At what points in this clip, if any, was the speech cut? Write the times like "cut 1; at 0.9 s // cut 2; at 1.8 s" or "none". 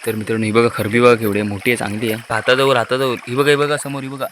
cut 1; at 2.3 s

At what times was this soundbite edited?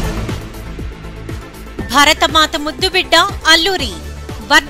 cut 1; at 1.6 s

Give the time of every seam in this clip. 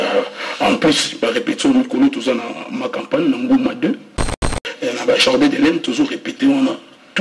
cut 1; at 4.4 s

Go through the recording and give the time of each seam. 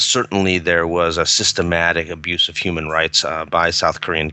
none

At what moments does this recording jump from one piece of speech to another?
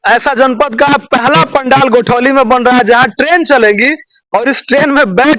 none

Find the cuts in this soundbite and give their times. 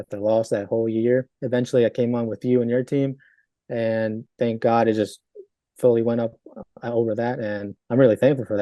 cut 1; at 1.4 s // cut 2; at 4.2 s // cut 3; at 7.7 s

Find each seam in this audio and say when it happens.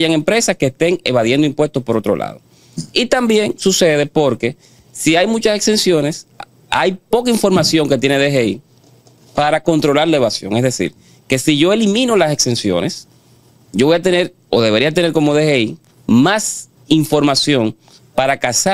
none

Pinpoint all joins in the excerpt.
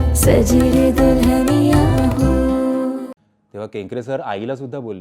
cut 1; at 3.2 s

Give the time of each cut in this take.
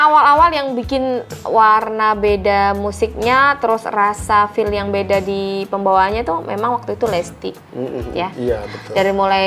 cut 1; at 1.3 s

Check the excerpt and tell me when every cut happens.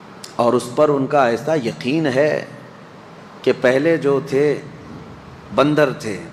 none

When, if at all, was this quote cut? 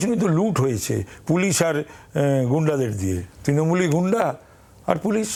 none

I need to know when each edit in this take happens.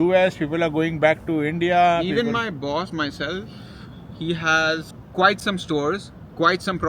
none

